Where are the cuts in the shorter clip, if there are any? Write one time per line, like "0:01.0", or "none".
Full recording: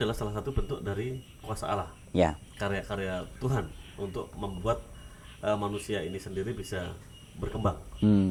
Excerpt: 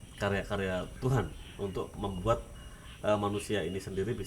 none